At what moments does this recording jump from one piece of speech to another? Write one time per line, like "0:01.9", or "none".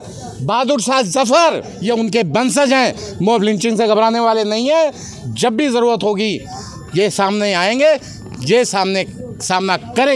0:01.7